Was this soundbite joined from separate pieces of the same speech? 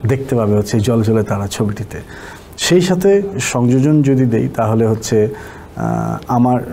no; 0 cuts

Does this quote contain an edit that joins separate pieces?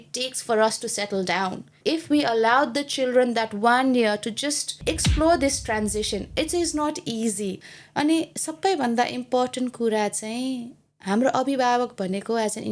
yes; 3 cuts; at 1.7 s, 4.8 s, 7.6 s

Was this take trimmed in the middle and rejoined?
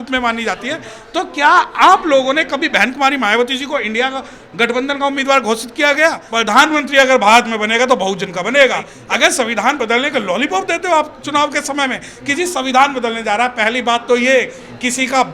yes; 2 cuts; at 6.2 s, 8.9 s

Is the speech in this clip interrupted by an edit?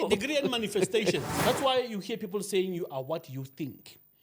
yes; 1 cut; at 1.3 s

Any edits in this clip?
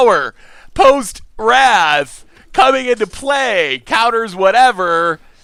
no; 0 cuts

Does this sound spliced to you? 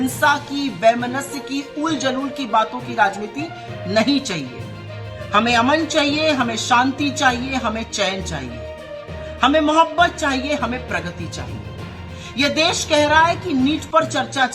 no; 0 cuts

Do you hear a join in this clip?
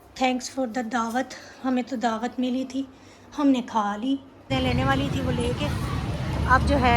yes; 1 cut; at 4.5 s

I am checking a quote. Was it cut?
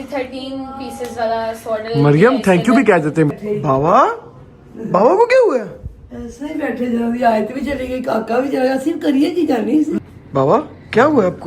yes; 2 cuts; at 3.3 s, 10.0 s

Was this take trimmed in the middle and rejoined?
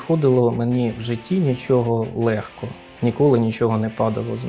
no; 0 cuts

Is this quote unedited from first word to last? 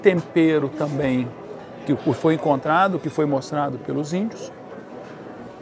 yes; 0 cuts

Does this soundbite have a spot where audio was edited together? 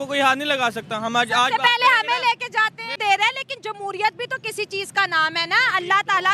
yes; 1 cut; at 3.0 s

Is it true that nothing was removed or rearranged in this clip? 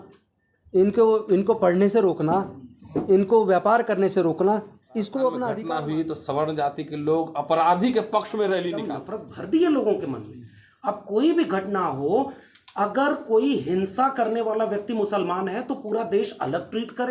no; 2 cuts; at 5.6 s, 8.9 s

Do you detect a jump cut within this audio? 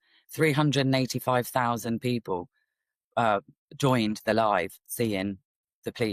no; 0 cuts

